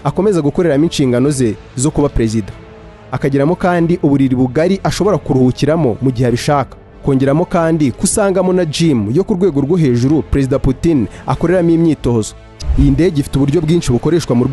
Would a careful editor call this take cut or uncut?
cut